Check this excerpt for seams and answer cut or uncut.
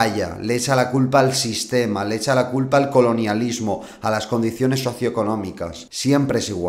cut